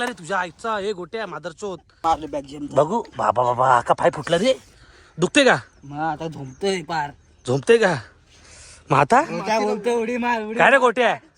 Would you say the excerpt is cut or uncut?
cut